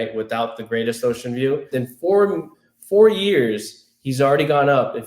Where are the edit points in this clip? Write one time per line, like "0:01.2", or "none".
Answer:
0:01.7